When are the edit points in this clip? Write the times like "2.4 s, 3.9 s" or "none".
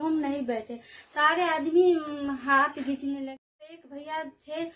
3.3 s